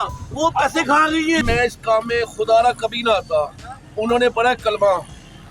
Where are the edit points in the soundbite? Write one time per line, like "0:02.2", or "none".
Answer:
0:01.4